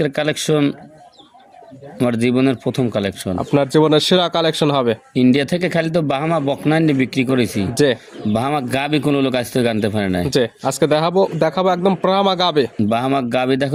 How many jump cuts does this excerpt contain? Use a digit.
0